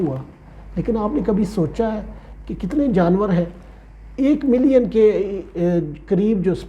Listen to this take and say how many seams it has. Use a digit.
0